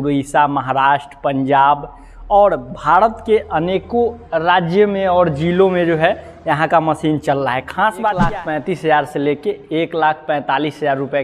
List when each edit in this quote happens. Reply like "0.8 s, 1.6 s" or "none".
8.3 s